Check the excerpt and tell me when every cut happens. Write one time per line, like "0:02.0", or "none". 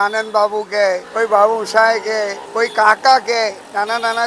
0:01.1
0:02.4

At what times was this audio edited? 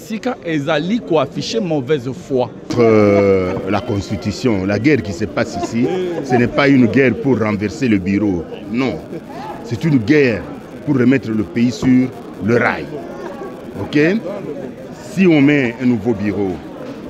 0:02.7

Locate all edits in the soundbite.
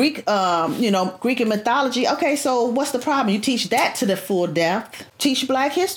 0:05.0

